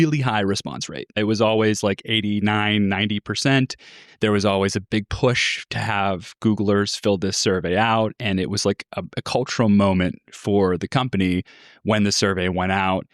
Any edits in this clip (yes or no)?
yes